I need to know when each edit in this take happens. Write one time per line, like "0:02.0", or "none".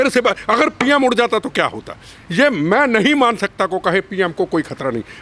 none